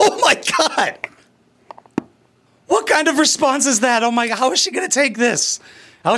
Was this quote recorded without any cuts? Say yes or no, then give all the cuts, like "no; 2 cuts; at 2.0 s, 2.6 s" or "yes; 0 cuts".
no; 1 cut; at 2.4 s